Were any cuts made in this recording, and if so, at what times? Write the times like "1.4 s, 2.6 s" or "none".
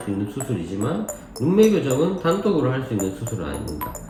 none